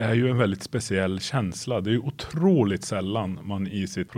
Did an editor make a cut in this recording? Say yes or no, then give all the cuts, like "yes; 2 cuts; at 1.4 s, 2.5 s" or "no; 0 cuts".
no; 0 cuts